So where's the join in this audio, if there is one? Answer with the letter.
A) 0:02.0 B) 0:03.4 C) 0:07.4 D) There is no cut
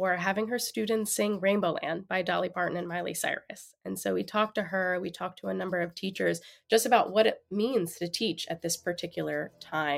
D